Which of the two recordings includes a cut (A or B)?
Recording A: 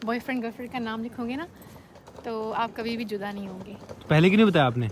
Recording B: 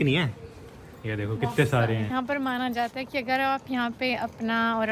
B